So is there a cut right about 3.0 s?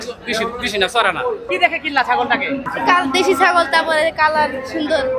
no; 1 cut; at 1.5 s

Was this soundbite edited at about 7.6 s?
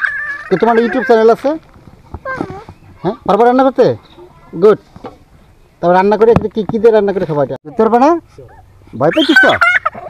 yes; 1 cut; at 7.6 s

